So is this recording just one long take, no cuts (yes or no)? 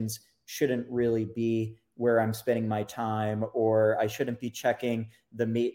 yes